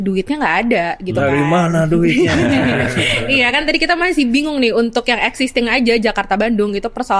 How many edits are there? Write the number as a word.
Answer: zero